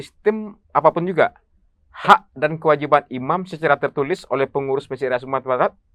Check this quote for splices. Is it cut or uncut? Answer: uncut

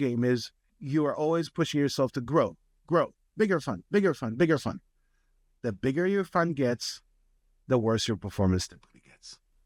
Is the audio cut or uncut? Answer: uncut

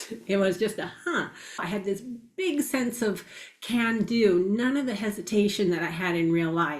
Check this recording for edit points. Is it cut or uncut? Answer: cut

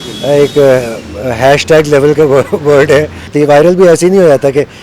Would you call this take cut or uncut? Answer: cut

